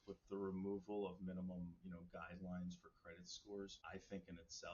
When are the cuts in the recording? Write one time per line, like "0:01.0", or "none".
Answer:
0:03.8

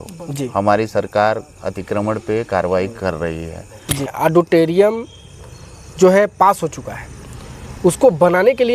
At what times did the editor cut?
0:04.1

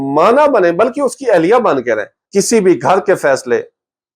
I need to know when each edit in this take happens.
0:02.1

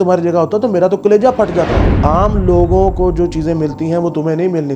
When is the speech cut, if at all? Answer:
0:01.8

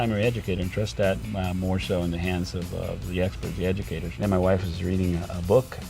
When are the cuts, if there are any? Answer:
0:04.0

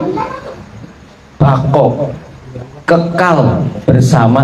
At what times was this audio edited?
none

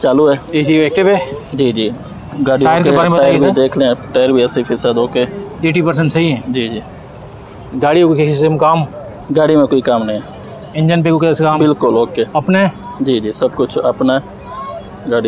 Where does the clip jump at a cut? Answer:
none

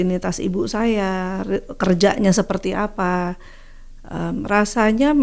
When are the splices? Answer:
none

